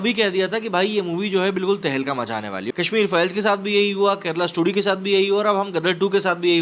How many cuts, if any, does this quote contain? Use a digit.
1